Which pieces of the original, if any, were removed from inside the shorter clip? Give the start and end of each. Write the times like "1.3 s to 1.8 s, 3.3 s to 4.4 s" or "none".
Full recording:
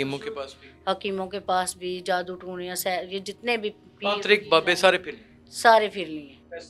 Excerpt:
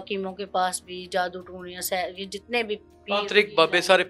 none